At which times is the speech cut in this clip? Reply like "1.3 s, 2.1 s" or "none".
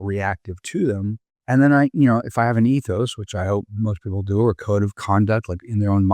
1.3 s